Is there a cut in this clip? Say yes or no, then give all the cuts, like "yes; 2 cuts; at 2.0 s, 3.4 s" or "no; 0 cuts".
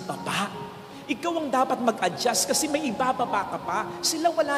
no; 0 cuts